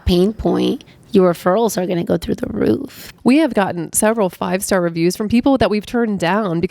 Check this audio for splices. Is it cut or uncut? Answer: cut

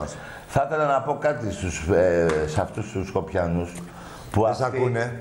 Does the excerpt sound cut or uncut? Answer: cut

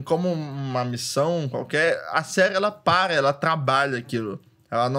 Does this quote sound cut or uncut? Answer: uncut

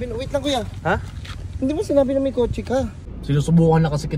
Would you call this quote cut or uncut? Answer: cut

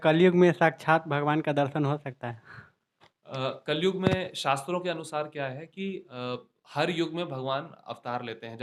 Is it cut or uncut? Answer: uncut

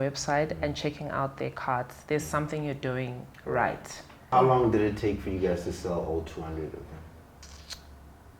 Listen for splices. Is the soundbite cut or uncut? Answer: cut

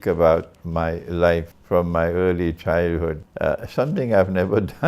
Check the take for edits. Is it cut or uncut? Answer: cut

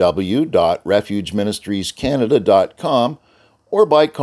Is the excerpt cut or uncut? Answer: uncut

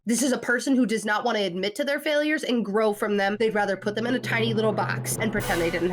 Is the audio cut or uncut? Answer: uncut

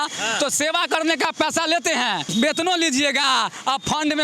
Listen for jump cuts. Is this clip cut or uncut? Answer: cut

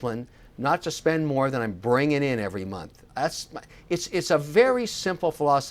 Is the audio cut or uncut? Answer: uncut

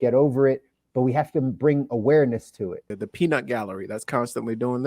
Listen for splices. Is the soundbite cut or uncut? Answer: cut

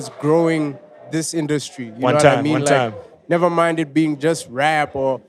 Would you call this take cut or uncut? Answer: uncut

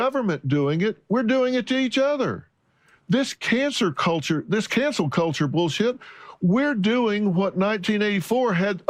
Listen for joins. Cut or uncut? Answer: uncut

